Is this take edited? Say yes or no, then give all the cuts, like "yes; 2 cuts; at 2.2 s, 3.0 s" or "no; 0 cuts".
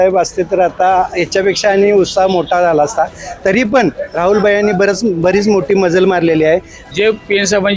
yes; 1 cut; at 6.8 s